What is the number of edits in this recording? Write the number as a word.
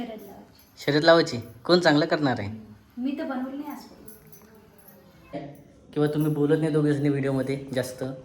one